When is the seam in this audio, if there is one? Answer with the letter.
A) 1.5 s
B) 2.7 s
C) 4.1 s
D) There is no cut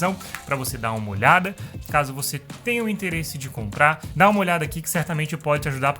C